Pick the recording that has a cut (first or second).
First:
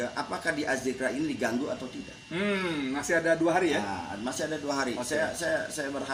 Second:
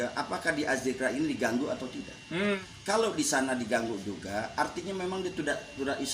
second